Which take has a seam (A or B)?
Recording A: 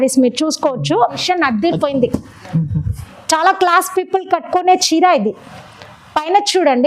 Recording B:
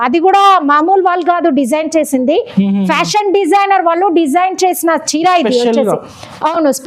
A